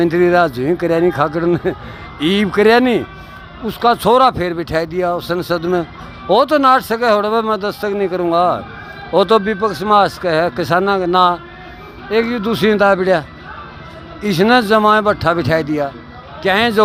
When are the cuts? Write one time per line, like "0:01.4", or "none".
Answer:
none